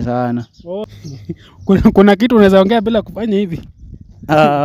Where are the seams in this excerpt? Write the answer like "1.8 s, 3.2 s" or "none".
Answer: 0.9 s